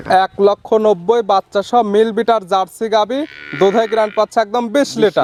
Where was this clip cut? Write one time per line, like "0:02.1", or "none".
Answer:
none